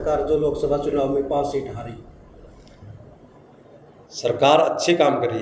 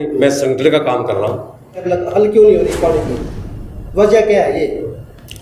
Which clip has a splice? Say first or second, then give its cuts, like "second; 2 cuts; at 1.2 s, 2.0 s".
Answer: second; 1 cut; at 1.8 s